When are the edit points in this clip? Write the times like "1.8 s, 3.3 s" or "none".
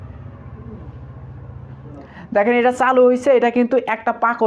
none